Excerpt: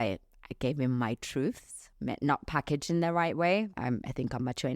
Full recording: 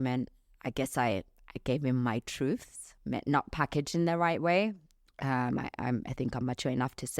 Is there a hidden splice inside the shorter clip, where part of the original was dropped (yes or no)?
yes